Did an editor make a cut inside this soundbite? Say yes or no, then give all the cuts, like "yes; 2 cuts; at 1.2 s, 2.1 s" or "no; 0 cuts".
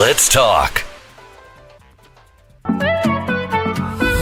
no; 0 cuts